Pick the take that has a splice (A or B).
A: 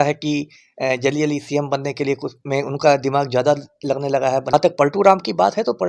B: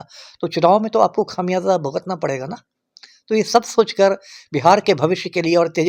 A